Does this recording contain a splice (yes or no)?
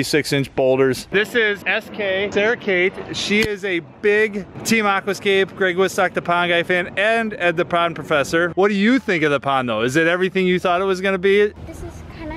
yes